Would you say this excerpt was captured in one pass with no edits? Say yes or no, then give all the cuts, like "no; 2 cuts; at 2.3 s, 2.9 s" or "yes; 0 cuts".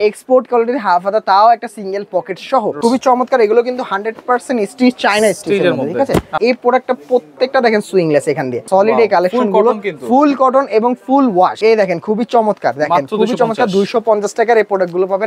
no; 4 cuts; at 2.8 s, 6.3 s, 8.7 s, 11.6 s